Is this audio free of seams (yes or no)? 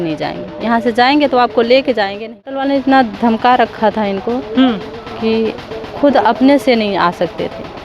no